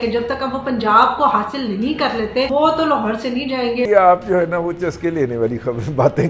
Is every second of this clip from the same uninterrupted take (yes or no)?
no